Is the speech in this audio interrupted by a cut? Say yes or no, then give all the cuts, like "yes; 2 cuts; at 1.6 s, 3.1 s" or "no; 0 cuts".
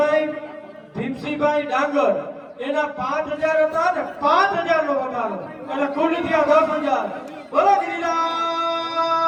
no; 0 cuts